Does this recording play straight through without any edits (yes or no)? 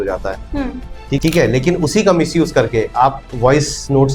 no